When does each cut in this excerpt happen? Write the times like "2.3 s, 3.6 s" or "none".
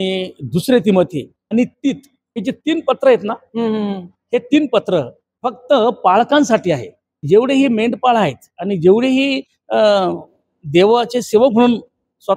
1.4 s, 2.4 s, 5.2 s, 7.2 s